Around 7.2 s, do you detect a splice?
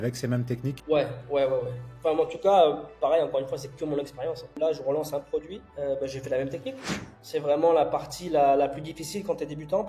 yes; 4 cuts; at 0.8 s, 4.5 s, 5.6 s, 7.2 s

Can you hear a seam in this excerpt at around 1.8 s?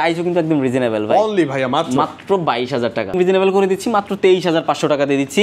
no; 1 cut; at 3.2 s

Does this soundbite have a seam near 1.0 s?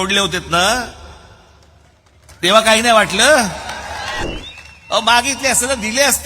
no; 1 cut; at 4.2 s

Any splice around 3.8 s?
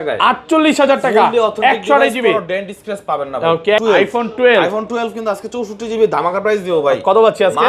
yes; 1 cut; at 3.8 s

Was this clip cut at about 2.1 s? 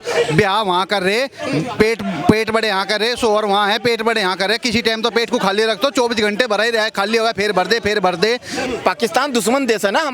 no; 1 cut; at 8.6 s

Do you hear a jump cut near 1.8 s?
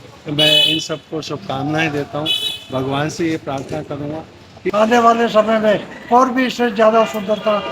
no; 1 cut; at 4.5 s

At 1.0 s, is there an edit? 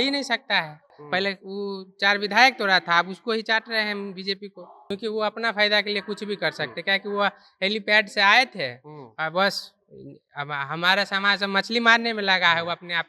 yes; 2 cuts; at 1.0 s, 4.8 s

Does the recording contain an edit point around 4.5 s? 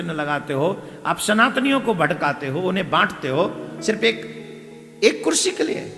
no; 0 cuts

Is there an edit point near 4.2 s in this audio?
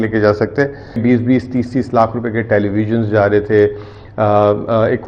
no; 1 cut; at 1.0 s

